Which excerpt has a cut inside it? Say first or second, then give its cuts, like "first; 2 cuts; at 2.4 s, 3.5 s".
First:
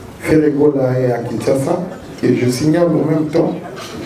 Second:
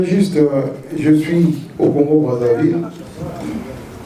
first; 1 cut; at 2.2 s